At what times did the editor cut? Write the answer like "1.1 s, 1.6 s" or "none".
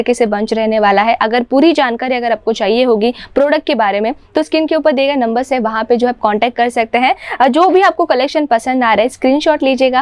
none